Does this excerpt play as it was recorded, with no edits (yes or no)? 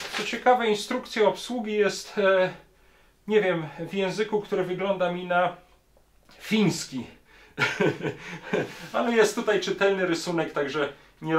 yes